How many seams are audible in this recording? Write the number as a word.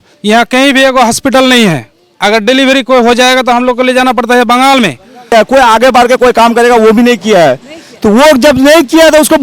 one